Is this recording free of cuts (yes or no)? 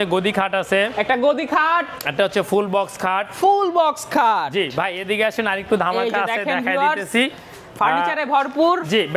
yes